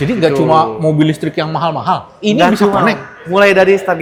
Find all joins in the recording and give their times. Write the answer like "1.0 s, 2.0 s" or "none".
none